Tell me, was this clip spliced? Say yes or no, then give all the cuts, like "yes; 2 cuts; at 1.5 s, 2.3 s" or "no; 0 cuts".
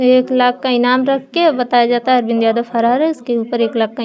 no; 0 cuts